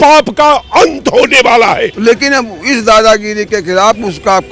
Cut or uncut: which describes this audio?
cut